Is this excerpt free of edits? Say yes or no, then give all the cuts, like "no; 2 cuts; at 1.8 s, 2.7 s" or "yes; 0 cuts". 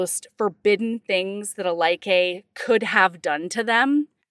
yes; 0 cuts